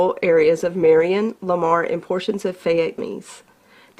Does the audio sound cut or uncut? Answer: cut